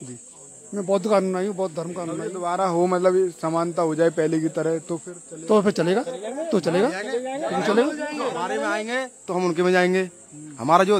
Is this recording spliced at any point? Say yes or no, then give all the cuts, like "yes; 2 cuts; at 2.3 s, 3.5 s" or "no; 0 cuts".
no; 0 cuts